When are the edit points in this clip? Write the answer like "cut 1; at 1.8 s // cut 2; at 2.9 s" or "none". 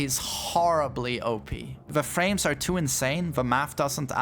cut 1; at 1.8 s

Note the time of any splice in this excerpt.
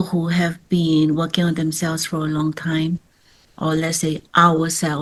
none

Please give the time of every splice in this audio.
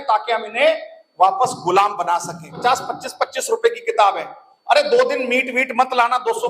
cut 1; at 2.5 s

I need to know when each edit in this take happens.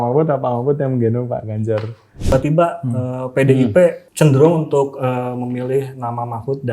cut 1; at 2.3 s

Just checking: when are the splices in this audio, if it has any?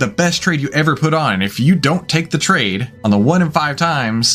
cut 1; at 2.9 s

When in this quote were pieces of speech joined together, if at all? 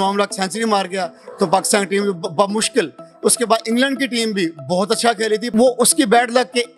cut 1; at 5.5 s

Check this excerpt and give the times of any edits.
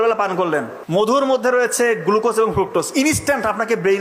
cut 1; at 1.1 s

